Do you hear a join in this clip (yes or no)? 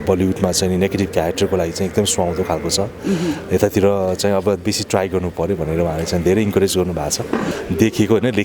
yes